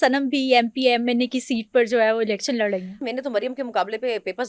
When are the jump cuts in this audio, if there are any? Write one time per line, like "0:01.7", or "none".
0:03.0